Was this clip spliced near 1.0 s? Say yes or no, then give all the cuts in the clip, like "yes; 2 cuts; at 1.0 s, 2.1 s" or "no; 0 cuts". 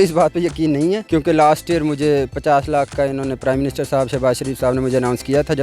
yes; 1 cut; at 1.0 s